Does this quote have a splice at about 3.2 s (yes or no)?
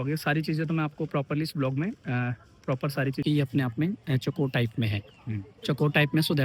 yes